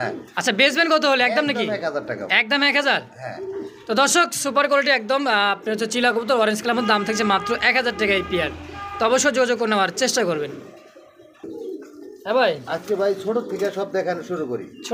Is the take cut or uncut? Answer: uncut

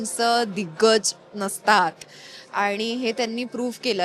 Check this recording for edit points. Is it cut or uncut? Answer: uncut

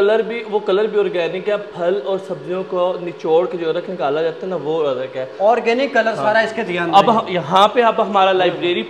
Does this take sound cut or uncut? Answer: uncut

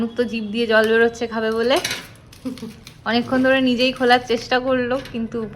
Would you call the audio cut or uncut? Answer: uncut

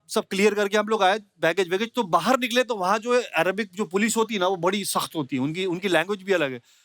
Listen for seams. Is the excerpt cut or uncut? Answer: uncut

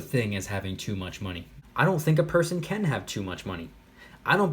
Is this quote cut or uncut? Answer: cut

